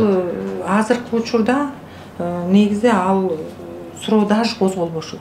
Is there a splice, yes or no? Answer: no